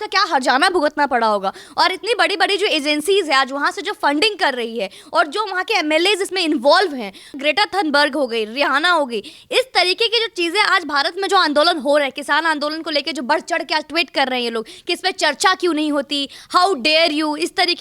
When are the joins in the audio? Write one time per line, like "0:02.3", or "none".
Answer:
0:07.3